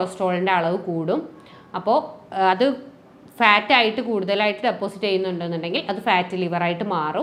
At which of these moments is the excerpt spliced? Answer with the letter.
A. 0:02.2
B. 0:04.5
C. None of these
C